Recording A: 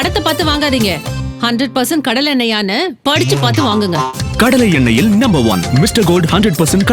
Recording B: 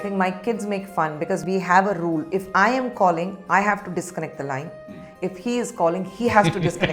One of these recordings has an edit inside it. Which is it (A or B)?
B